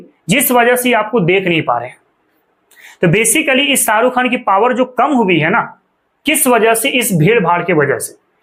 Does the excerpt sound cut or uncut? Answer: uncut